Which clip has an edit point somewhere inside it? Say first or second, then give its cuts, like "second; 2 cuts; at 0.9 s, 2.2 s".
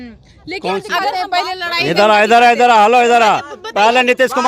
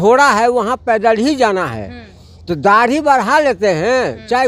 first; 1 cut; at 1.0 s